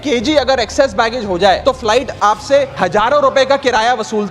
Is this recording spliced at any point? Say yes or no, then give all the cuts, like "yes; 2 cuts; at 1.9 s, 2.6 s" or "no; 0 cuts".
yes; 2 cuts; at 1.6 s, 2.7 s